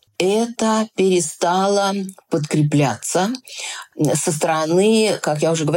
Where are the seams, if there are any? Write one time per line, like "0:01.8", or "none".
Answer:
none